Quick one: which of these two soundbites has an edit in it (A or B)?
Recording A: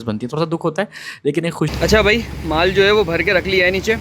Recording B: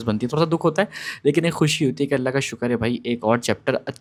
A